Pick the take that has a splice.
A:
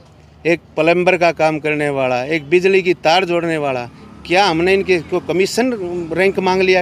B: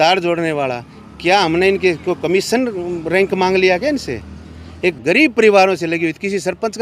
B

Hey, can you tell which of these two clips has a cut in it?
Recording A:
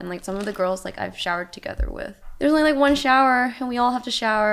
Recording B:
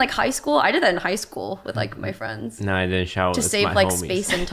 A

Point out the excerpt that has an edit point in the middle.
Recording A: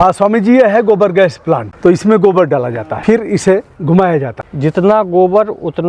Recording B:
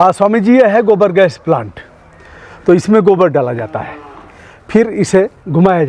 A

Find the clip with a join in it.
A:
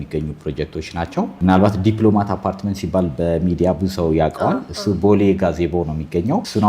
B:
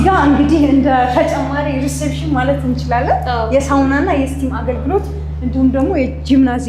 A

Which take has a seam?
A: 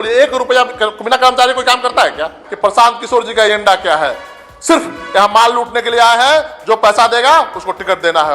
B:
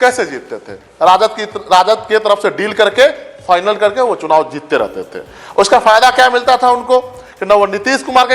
A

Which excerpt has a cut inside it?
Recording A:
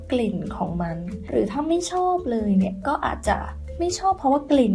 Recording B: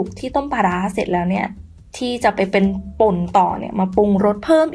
A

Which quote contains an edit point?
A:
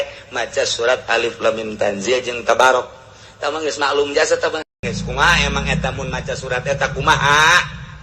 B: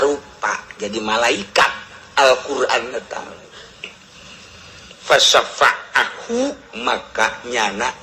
A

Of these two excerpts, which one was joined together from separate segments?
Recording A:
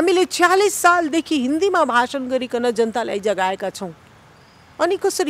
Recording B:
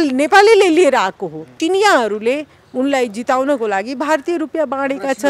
B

